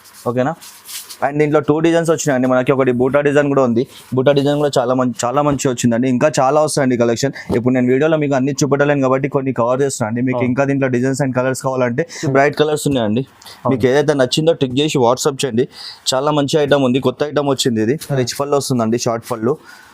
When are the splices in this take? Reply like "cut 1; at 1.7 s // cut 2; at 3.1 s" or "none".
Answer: cut 1; at 5.2 s // cut 2; at 12.2 s // cut 3; at 18.2 s